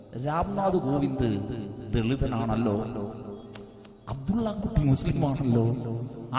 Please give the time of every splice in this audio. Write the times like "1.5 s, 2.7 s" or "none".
none